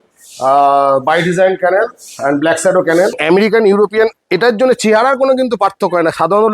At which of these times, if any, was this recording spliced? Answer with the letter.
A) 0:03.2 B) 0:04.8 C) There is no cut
A